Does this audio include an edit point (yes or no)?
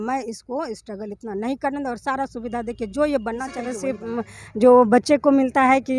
yes